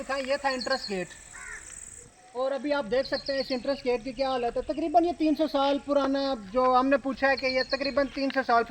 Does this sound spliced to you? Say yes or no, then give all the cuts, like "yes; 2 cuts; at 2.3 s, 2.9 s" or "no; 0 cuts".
no; 0 cuts